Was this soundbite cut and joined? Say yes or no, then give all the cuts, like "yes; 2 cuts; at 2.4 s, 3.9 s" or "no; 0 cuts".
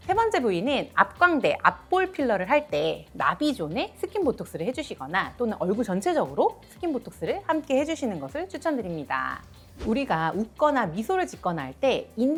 no; 0 cuts